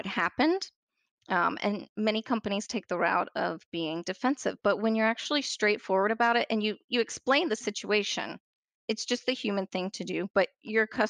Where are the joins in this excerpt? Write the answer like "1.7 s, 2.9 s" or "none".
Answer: 8.8 s